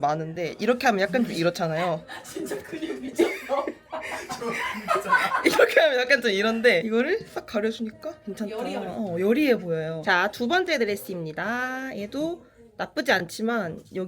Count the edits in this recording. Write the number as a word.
zero